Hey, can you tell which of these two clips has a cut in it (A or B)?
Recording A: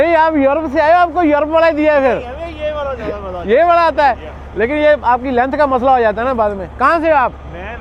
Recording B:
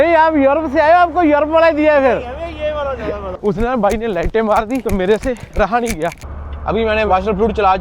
B